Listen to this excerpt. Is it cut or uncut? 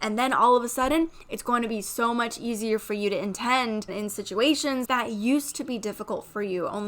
cut